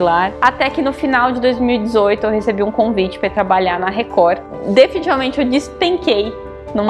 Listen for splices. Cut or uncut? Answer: cut